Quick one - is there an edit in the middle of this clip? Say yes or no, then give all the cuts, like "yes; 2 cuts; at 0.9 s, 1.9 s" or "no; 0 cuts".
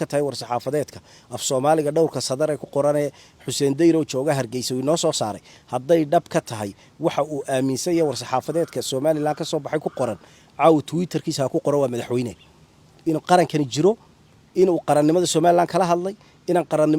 no; 0 cuts